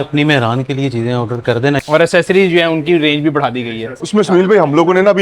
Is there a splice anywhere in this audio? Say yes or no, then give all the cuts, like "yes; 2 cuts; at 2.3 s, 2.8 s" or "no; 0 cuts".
yes; 2 cuts; at 1.8 s, 3.8 s